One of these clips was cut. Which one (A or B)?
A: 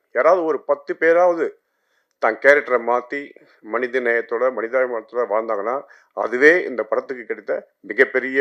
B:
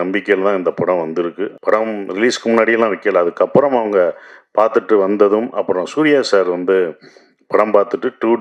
B